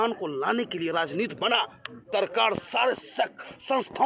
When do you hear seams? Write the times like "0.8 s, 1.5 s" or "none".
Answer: 2.0 s

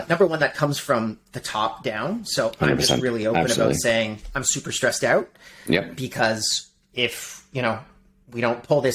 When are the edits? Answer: none

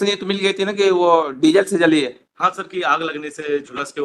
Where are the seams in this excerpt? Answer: none

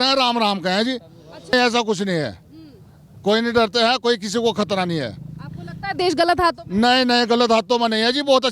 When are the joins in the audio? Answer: 1.5 s

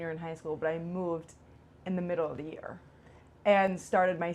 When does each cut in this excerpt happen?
none

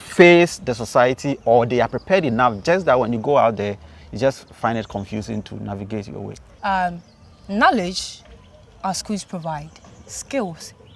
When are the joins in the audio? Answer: none

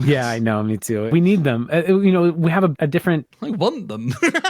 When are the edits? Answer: 1.0 s, 2.7 s

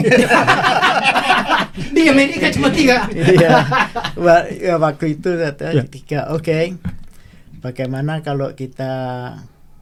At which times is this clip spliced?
none

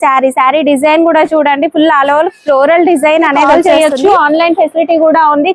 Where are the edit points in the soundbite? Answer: 3.5 s

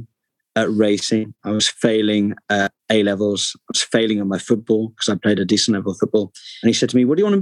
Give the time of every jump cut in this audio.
none

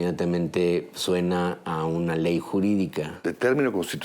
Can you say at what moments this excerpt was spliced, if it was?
3.1 s

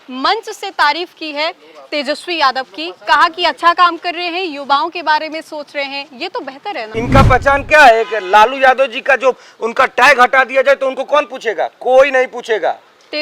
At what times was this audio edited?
6.9 s

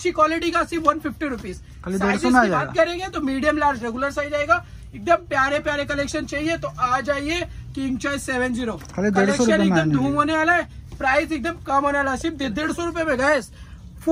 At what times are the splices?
none

